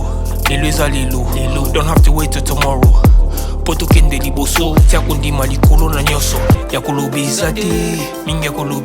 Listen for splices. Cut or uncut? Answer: cut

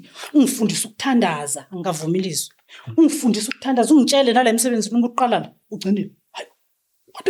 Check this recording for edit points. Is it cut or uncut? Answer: uncut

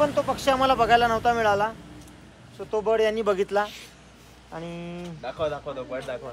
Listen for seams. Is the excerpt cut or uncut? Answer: uncut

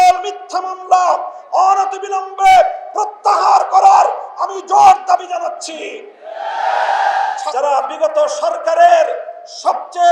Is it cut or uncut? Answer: cut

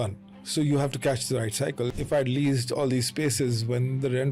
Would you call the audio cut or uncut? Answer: cut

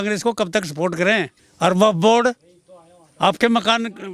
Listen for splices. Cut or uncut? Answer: cut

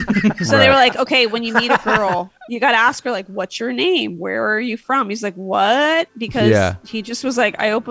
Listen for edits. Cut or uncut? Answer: uncut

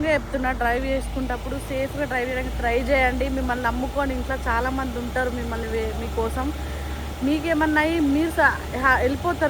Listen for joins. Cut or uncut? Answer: uncut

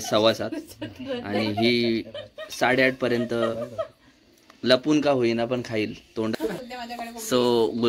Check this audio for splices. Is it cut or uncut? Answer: cut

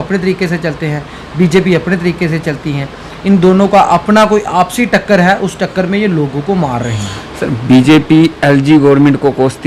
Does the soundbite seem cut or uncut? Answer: uncut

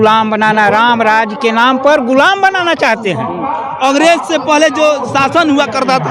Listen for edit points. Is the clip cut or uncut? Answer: uncut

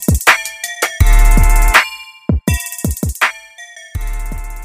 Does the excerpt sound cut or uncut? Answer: cut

